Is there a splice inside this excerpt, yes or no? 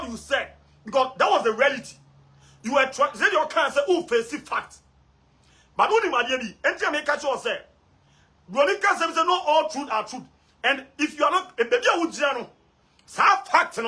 no